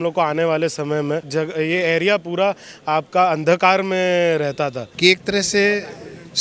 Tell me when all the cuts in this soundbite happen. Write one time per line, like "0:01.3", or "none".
0:01.3
0:04.8